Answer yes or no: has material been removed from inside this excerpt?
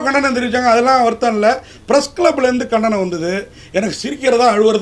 no